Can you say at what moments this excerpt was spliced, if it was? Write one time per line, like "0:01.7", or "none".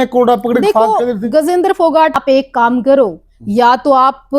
0:02.1